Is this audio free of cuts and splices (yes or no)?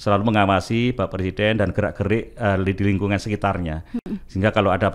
yes